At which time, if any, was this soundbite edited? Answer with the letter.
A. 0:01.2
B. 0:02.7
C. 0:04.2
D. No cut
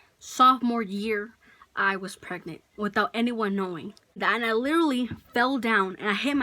C